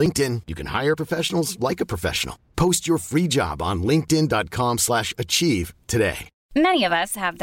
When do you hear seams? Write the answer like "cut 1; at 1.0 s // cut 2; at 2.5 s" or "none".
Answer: cut 1; at 6.3 s